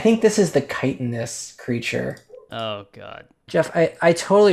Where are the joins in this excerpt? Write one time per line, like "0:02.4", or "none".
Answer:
0:03.4